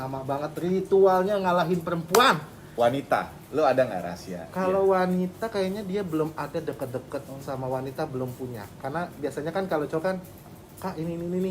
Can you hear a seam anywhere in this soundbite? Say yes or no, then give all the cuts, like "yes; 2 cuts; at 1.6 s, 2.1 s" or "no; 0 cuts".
yes; 1 cut; at 2.6 s